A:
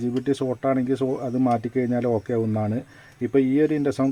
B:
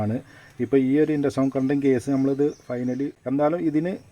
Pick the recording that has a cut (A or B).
B